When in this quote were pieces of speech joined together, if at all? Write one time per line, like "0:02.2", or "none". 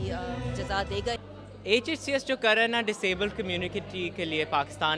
0:01.2